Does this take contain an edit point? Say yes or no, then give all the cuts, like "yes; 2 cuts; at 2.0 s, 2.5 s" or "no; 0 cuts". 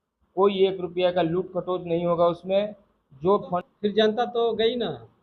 yes; 1 cut; at 3.6 s